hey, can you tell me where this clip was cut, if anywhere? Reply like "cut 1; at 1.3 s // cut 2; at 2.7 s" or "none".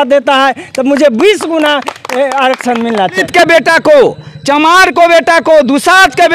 cut 1; at 3.2 s